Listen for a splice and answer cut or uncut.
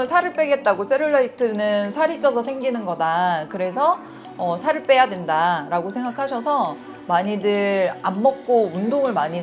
uncut